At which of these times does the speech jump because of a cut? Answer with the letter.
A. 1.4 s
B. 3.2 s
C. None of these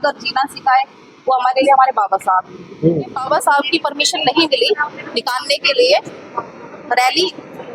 B